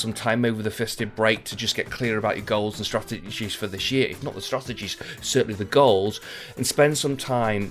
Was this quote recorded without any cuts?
yes; 0 cuts

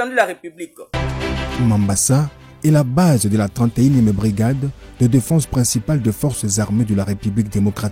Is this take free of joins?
no; 1 cut; at 0.9 s

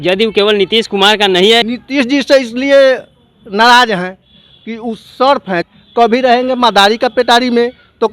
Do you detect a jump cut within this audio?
yes; 2 cuts; at 1.6 s, 5.6 s

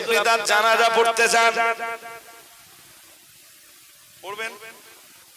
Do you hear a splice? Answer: no; 0 cuts

